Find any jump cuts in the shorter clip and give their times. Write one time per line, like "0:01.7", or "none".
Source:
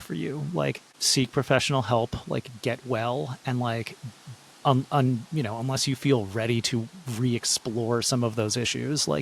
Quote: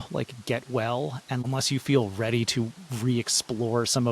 0:01.4